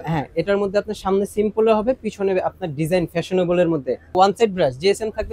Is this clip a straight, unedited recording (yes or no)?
no